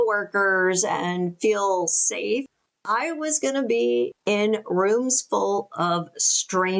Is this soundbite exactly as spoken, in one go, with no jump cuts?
yes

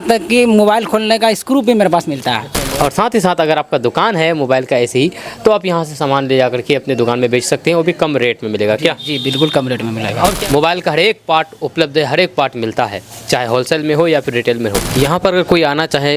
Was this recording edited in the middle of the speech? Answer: yes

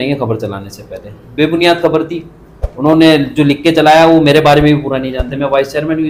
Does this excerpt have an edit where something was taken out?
no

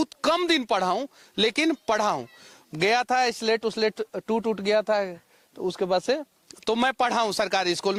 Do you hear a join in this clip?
no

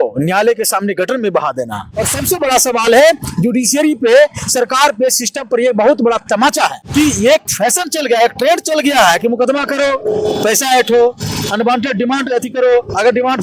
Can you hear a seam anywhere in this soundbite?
yes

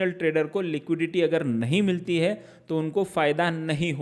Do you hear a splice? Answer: no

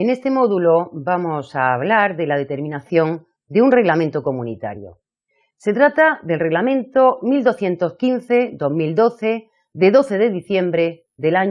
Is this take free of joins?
yes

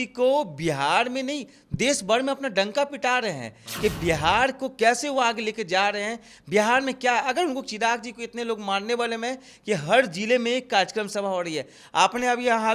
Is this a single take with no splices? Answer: yes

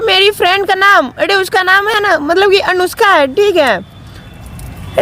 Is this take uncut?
yes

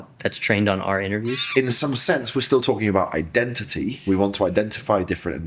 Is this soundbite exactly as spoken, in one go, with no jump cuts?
no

